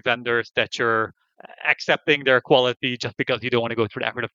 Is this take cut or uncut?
uncut